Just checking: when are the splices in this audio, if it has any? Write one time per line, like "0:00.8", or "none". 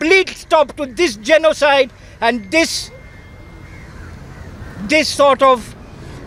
none